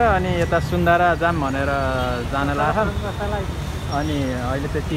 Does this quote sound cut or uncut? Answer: uncut